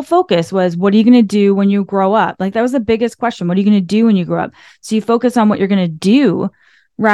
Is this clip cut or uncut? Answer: uncut